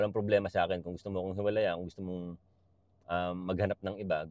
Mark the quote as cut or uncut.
uncut